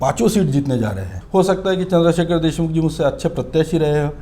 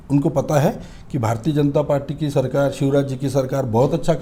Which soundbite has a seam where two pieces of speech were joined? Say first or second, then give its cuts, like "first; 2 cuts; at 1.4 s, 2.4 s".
first; 1 cut; at 1.1 s